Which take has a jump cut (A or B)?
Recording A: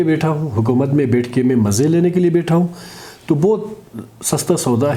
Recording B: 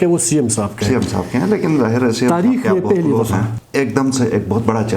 B